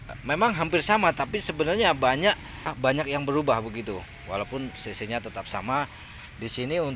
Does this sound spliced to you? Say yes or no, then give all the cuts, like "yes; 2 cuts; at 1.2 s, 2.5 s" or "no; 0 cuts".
yes; 1 cut; at 2.6 s